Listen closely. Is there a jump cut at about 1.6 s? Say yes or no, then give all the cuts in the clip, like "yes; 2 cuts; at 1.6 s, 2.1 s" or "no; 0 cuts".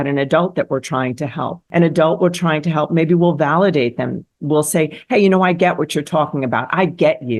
yes; 1 cut; at 1.6 s